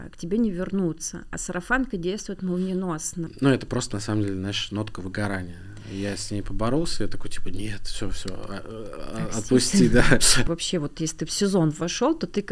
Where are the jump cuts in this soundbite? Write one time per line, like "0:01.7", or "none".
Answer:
0:03.3
0:10.5